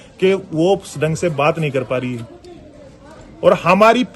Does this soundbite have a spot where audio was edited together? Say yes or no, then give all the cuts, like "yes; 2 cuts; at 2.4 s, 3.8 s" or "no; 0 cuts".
no; 0 cuts